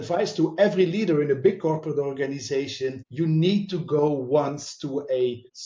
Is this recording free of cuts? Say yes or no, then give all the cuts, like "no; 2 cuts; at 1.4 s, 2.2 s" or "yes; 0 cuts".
yes; 0 cuts